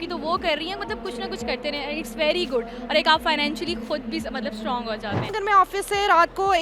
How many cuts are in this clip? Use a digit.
1